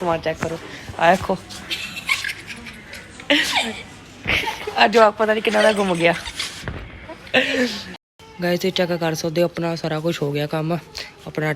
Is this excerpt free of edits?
no; 1 cut; at 7.9 s

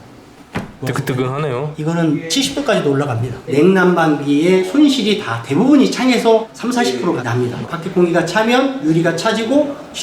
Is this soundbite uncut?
no; 4 cuts; at 0.8 s, 1.7 s, 3.3 s, 7.7 s

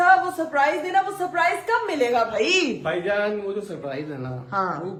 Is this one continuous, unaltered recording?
yes; 0 cuts

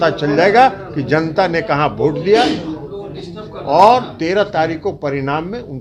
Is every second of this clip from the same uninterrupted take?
yes; 0 cuts

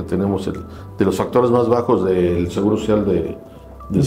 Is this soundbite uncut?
yes; 0 cuts

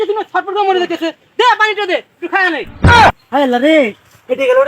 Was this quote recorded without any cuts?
no; 1 cut; at 3.2 s

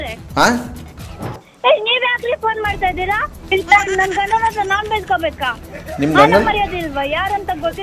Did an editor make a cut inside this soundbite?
yes; 1 cut; at 1.3 s

